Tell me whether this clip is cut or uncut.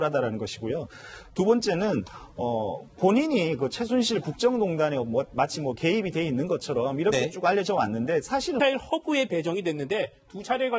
uncut